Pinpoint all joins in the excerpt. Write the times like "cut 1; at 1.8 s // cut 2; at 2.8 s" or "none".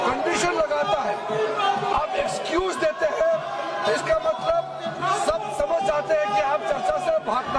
none